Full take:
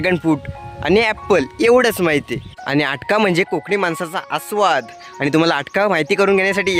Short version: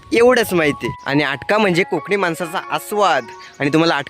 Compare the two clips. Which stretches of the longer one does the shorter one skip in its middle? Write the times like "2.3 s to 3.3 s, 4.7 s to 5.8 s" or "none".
2.4 s to 2.5 s